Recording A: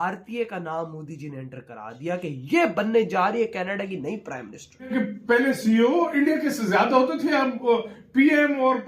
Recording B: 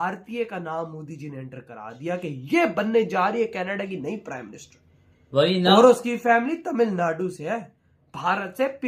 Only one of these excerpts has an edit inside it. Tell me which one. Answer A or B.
A